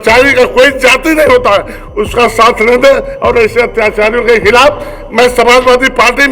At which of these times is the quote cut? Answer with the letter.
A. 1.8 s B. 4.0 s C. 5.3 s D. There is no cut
D